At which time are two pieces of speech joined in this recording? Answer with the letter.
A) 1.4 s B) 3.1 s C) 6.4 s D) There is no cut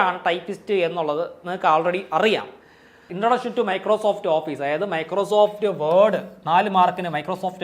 B